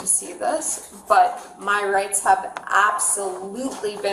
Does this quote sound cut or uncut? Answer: uncut